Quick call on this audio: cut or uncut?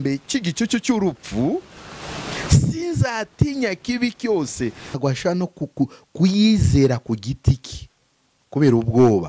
cut